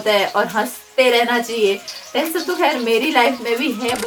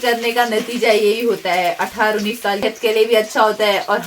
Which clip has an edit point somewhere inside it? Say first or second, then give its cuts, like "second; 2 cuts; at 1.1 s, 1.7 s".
second; 1 cut; at 2.6 s